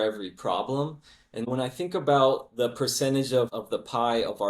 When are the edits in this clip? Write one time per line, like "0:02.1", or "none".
0:01.5
0:03.5